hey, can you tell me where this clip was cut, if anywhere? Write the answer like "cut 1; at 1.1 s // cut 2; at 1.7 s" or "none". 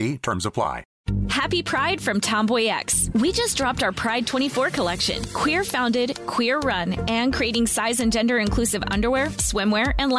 cut 1; at 0.9 s